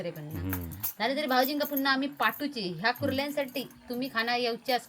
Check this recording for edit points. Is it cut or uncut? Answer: uncut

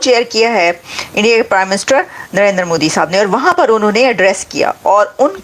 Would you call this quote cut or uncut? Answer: uncut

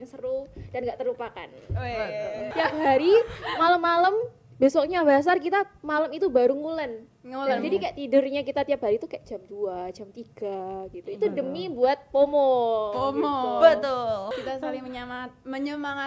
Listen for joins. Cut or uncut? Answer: cut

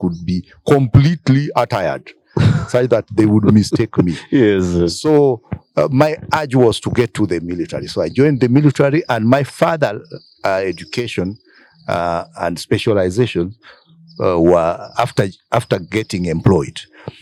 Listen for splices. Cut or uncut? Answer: uncut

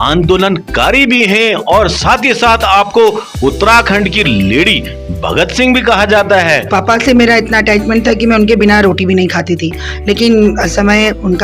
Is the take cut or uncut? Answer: cut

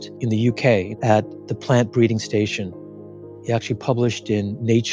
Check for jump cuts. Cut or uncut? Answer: cut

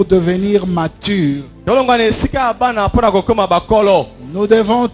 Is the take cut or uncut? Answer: uncut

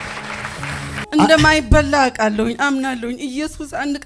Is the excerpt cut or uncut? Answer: cut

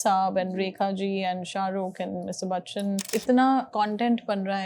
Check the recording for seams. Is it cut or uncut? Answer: cut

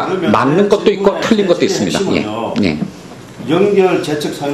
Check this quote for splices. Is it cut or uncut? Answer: cut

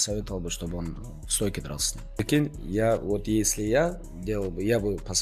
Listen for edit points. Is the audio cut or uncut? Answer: cut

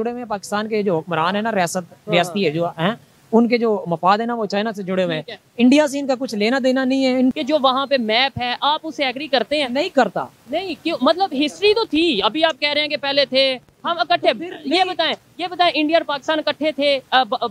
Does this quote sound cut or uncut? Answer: cut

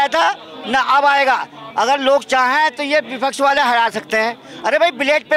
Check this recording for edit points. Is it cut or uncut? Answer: uncut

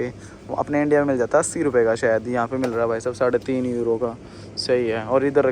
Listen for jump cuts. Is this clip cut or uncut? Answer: uncut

